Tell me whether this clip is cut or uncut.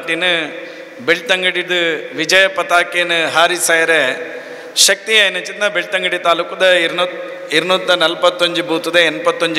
uncut